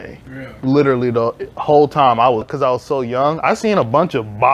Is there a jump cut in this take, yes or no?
yes